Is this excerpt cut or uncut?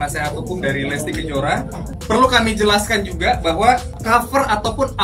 cut